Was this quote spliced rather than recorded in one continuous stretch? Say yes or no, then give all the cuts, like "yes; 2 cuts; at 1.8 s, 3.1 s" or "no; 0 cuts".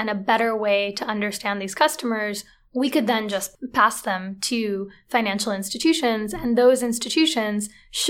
yes; 1 cut; at 3.5 s